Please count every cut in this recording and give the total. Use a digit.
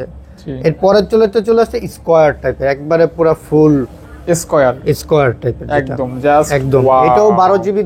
0